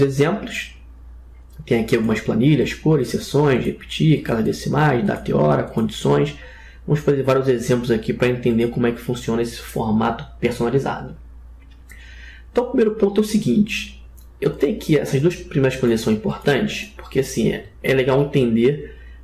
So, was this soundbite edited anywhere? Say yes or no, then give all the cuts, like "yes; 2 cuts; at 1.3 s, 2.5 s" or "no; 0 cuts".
no; 0 cuts